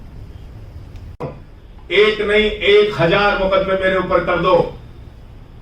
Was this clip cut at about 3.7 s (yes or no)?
no